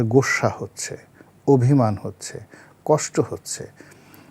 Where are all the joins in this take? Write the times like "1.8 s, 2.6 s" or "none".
none